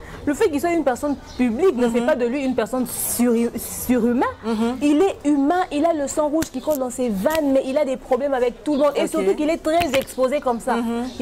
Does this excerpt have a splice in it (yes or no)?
no